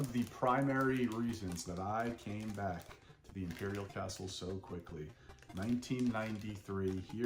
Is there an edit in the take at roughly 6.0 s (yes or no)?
no